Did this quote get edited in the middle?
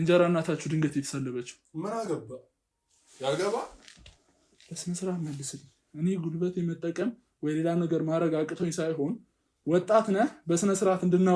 no; 0 cuts

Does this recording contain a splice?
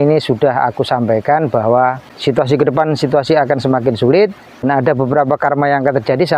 yes; 2 cuts; at 2.1 s, 4.6 s

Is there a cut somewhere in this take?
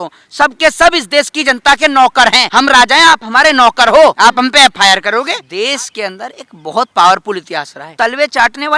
yes; 4 cuts; at 2.4 s, 4.2 s, 5.4 s, 7.8 s

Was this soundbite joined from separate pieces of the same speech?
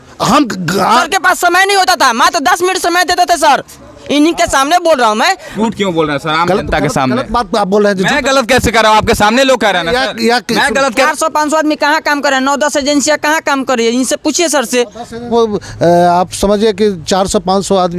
yes; 4 cuts; at 1.0 s, 5.5 s, 11.0 s, 15.3 s

